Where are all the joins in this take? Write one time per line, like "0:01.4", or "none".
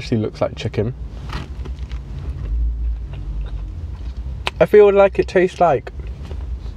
0:01.2